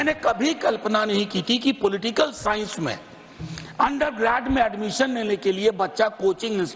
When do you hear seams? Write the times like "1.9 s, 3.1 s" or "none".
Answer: none